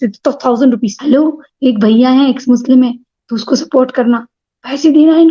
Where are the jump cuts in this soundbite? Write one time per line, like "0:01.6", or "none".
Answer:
0:01.0